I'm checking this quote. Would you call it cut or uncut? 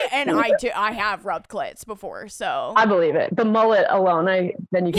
cut